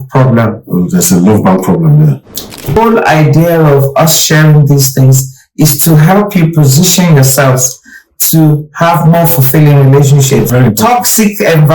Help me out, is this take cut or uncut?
cut